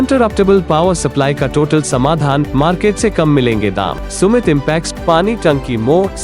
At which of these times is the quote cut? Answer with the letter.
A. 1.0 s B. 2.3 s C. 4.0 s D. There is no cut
C